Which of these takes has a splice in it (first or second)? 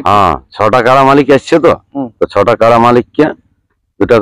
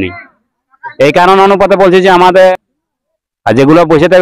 second